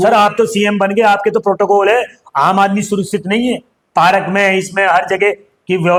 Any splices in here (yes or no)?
no